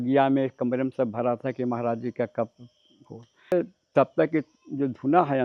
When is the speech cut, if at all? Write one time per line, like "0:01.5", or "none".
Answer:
0:03.5